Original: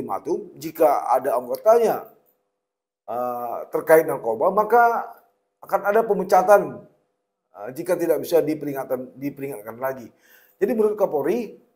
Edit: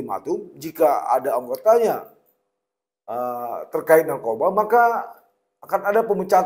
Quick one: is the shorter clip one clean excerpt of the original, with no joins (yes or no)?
yes